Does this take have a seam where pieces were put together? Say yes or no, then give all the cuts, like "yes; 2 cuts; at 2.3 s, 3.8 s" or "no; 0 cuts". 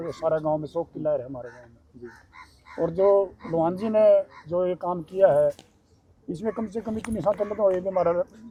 no; 0 cuts